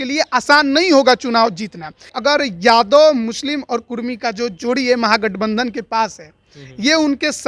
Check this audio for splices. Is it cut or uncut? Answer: cut